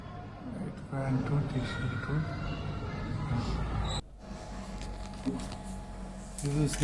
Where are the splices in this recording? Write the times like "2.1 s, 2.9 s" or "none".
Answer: 4.0 s

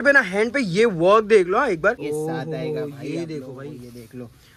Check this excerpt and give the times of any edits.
2.0 s

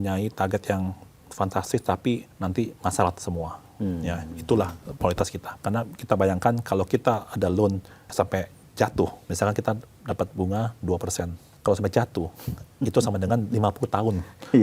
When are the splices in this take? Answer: 2.3 s, 5.5 s, 7.9 s, 9.2 s, 11.4 s

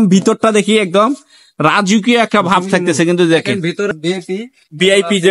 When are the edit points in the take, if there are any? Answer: 3.9 s

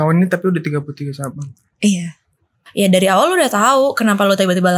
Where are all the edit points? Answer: 2.6 s

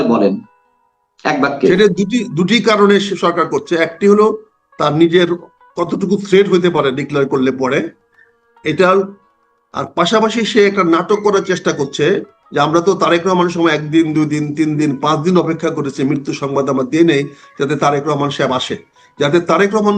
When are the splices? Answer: none

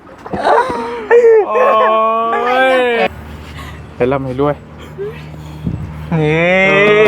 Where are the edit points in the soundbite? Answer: 3.1 s

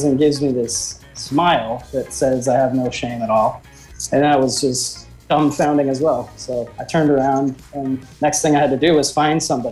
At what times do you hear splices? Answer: none

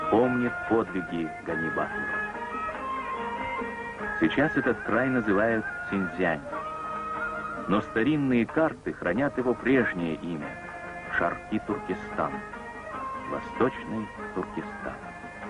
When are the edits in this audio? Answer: 8.9 s

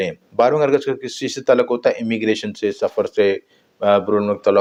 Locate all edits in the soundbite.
none

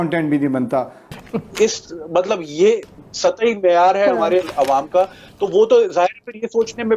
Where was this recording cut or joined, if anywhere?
1.1 s

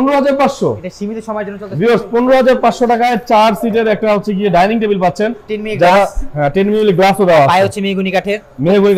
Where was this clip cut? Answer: none

